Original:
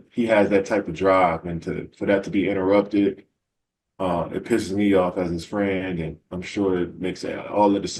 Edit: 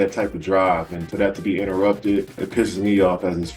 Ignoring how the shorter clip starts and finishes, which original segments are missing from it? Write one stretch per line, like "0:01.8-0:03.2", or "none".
0:01.5-0:01.9
0:03.3-0:04.3